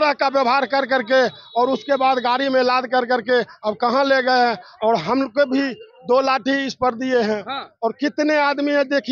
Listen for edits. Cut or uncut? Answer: uncut